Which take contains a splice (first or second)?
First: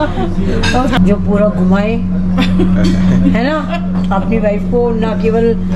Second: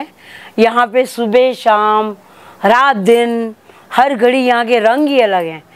first